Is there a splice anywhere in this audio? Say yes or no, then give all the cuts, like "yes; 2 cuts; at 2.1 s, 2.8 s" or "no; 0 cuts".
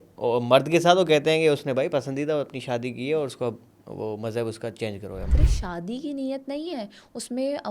yes; 1 cut; at 5.2 s